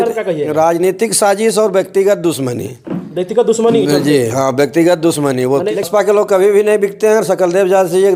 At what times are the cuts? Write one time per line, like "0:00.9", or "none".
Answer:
0:05.7